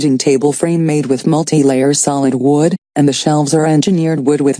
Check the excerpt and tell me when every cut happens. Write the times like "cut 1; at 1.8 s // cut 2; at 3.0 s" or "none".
cut 1; at 1.1 s